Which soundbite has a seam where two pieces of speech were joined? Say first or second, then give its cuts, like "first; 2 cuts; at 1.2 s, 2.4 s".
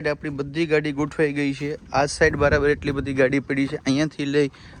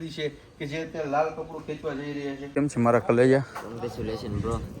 second; 1 cut; at 2.4 s